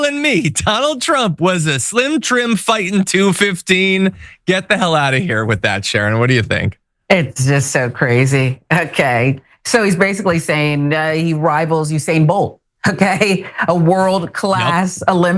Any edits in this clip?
no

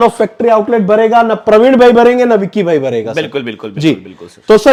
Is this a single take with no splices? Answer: yes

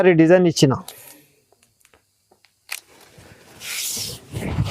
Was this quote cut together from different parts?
no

